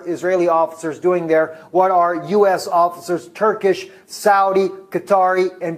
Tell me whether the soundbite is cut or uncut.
cut